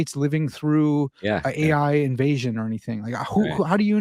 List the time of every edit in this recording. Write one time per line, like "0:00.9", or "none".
none